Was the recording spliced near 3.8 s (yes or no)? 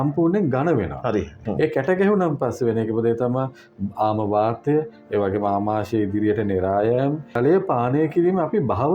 no